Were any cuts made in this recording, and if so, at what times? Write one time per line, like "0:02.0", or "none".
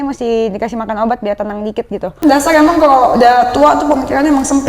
0:02.2